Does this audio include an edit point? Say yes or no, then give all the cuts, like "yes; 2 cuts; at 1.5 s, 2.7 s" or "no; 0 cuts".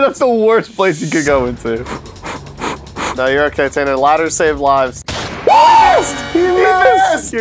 no; 0 cuts